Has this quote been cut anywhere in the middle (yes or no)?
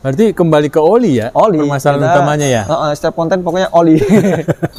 no